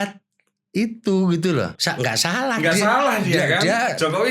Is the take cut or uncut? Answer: cut